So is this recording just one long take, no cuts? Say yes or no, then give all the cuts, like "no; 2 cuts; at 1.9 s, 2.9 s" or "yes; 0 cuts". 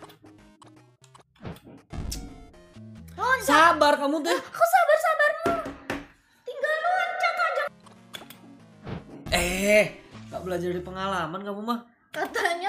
no; 1 cut; at 7.7 s